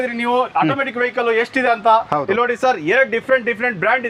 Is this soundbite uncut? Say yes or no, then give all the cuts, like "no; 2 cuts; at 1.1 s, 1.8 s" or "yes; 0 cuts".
yes; 0 cuts